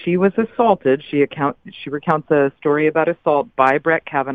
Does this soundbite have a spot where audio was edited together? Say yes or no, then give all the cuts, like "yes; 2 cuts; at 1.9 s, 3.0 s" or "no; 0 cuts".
no; 0 cuts